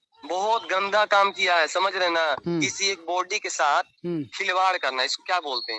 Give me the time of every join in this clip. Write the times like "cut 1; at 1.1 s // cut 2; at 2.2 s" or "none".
none